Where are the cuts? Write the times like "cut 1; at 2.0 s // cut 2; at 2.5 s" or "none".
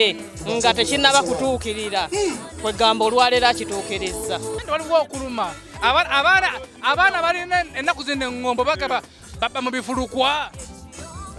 cut 1; at 4.5 s